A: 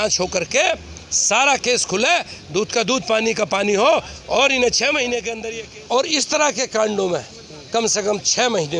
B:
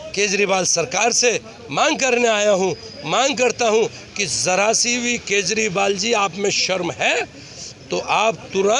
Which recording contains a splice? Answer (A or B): A